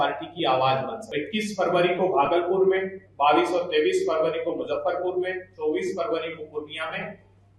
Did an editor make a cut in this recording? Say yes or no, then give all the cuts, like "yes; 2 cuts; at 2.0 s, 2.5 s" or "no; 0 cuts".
yes; 1 cut; at 1.0 s